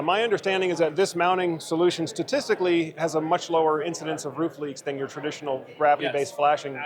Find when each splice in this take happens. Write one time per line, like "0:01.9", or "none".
none